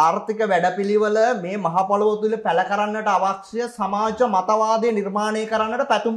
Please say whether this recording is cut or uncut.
uncut